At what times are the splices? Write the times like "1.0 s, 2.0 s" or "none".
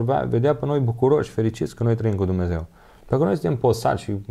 none